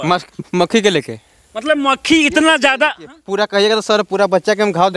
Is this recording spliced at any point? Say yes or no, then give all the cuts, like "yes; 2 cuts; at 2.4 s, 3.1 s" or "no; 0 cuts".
no; 0 cuts